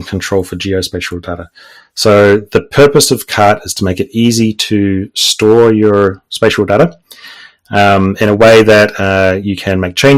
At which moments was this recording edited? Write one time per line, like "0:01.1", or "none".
none

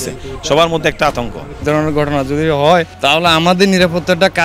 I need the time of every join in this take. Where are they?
0:01.6
0:02.9

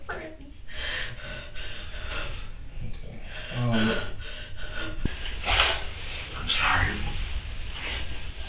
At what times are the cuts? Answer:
0:05.1

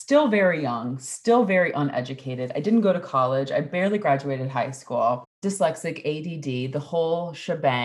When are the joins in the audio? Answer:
0:05.3

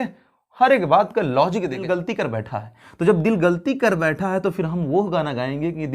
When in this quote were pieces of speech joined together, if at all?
0:01.8

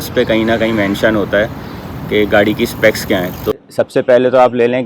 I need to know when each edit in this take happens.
0:03.5

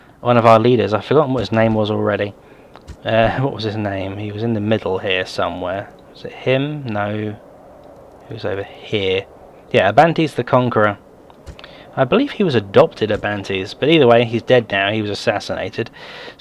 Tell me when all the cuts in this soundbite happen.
none

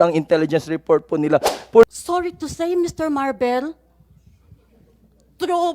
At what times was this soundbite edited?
0:01.8

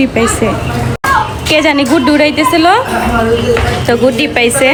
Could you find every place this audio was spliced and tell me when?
none

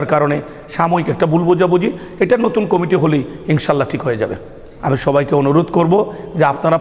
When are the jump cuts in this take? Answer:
0:04.6

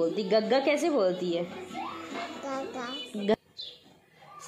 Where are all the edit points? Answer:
0:03.3

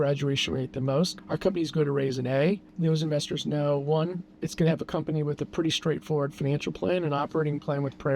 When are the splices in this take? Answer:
0:01.2

